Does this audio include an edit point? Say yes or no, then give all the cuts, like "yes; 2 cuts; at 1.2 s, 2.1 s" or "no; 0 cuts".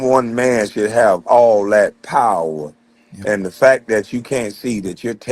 no; 0 cuts